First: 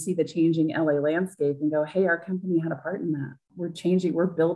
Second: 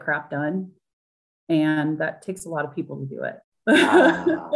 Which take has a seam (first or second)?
second